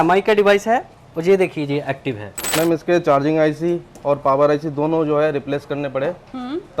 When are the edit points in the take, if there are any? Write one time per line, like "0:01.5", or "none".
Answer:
0:02.3